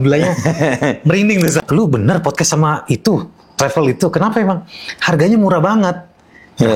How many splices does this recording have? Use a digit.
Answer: 1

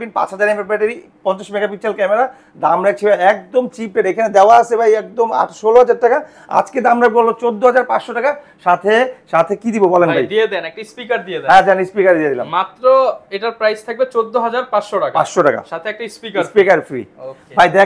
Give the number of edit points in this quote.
0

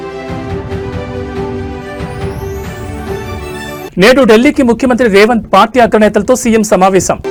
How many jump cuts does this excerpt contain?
0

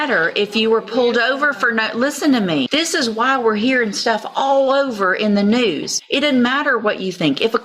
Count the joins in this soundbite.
2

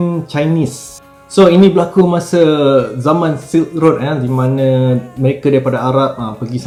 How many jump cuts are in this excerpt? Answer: 0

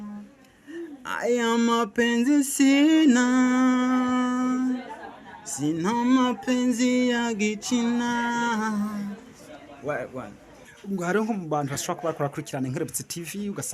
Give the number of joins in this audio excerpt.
1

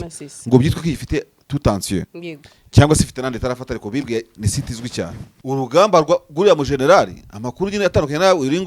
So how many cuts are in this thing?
1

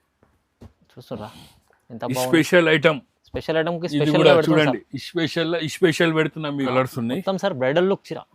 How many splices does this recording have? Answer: 1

